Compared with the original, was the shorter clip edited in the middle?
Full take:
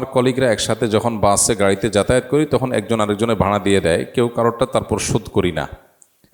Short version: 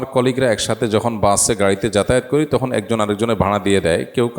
no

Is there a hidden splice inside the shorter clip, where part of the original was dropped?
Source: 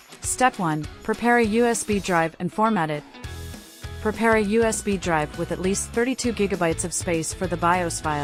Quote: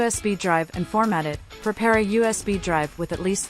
yes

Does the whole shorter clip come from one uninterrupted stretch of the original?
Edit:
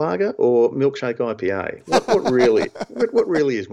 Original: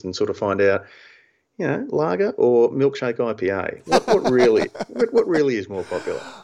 yes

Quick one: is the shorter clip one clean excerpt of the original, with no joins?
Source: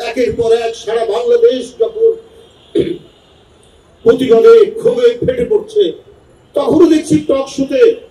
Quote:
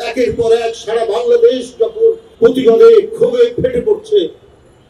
no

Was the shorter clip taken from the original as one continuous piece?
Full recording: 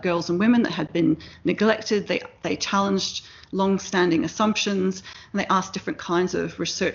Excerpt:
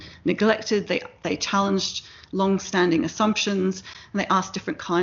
yes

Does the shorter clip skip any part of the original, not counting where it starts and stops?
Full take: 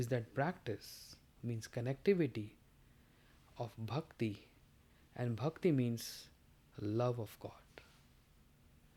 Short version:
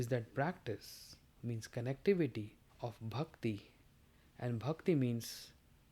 yes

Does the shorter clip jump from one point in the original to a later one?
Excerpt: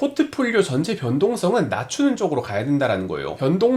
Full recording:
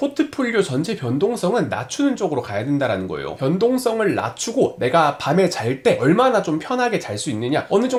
no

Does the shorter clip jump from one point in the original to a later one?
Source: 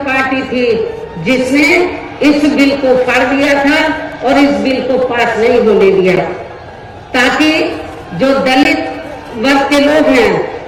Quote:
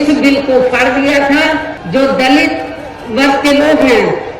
yes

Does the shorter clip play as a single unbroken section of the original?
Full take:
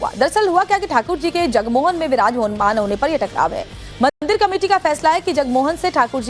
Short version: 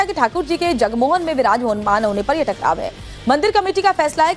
no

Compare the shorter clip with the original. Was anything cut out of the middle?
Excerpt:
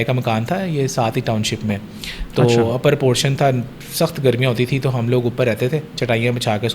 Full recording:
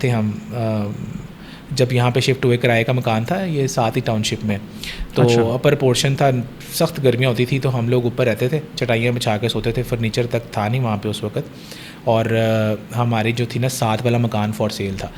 no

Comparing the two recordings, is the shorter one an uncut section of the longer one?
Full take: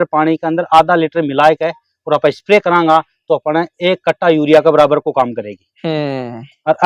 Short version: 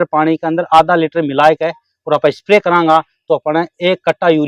yes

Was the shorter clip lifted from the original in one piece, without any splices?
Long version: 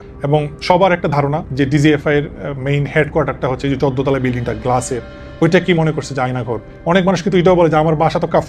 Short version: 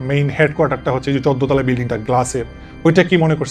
yes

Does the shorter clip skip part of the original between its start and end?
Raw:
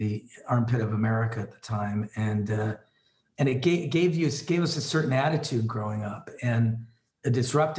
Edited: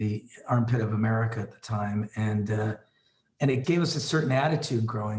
yes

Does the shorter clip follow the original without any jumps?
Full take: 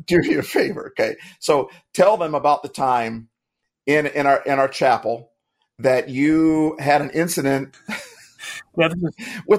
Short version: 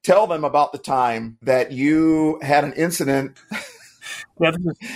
no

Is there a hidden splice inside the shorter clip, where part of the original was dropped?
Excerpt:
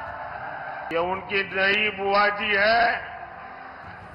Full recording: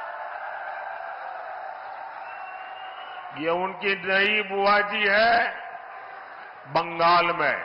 yes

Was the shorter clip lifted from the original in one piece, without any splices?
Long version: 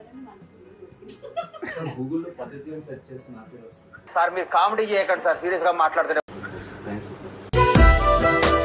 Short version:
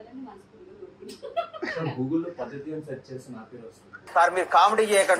yes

